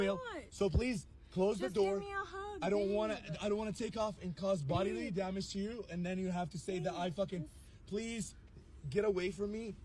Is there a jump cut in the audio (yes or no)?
no